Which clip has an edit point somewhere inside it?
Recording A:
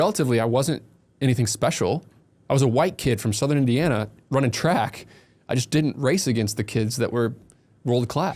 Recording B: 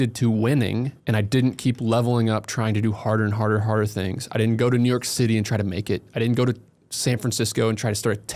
B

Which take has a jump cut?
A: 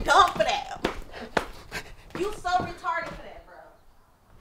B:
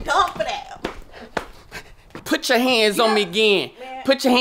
B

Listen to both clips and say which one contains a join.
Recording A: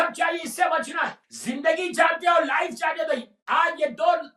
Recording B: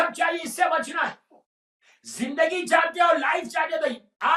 A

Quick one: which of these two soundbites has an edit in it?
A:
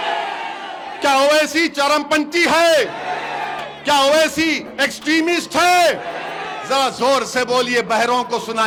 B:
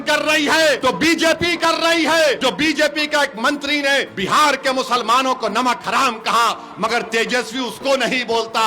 B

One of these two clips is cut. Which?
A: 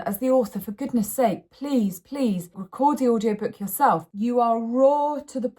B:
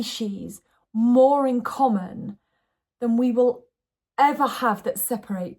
A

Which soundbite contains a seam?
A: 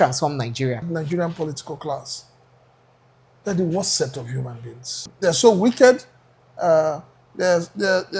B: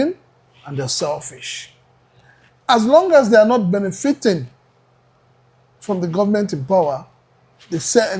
A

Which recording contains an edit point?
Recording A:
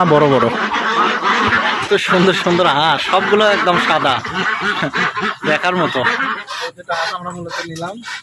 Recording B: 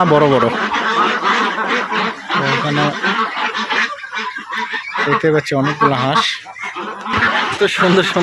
A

